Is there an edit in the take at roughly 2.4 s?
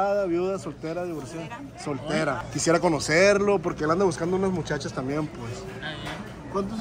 yes; 1 cut; at 2.4 s

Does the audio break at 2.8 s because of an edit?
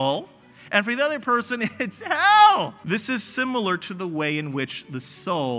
yes; 1 cut; at 2.8 s

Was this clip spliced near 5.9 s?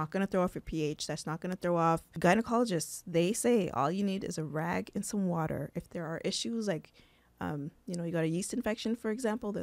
no; 1 cut; at 2.1 s

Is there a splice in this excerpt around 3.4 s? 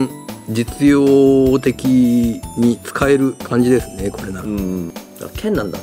yes; 2 cuts; at 3.4 s, 4.9 s

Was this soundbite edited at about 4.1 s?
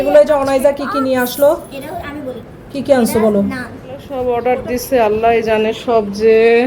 yes; 1 cut; at 4.1 s

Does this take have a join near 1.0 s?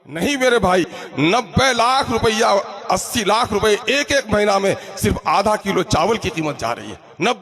yes; 1 cut; at 1.0 s

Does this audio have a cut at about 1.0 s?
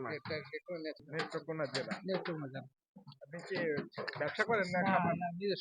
yes; 1 cut; at 1.0 s

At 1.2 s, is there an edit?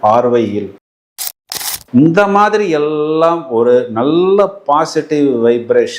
yes; 1 cut; at 1.2 s

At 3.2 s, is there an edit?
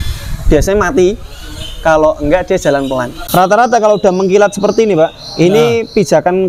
yes; 1 cut; at 3.2 s

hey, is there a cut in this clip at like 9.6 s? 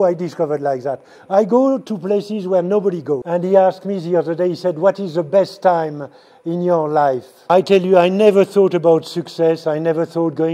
no; 2 cuts; at 3.2 s, 7.3 s

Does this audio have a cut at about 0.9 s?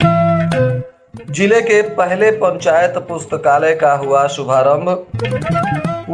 yes; 1 cut; at 0.9 s

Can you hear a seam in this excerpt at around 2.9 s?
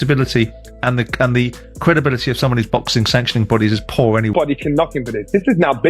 no; 1 cut; at 4.3 s

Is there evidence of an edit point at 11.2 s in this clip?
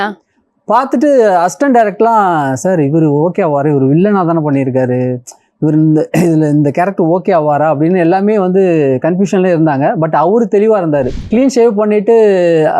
yes; 1 cut; at 11.2 s

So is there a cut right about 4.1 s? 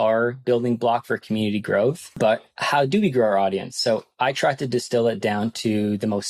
no; 1 cut; at 2.1 s

